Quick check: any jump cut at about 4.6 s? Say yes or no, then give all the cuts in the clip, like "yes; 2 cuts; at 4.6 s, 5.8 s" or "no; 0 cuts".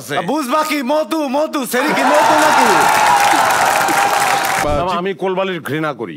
yes; 1 cut; at 4.6 s